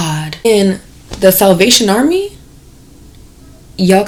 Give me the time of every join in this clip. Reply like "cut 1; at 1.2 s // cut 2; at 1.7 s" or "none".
none